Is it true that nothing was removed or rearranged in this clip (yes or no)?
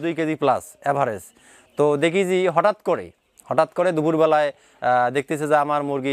yes